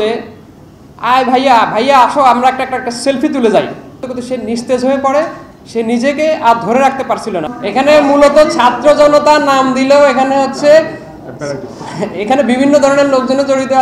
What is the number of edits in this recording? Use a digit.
2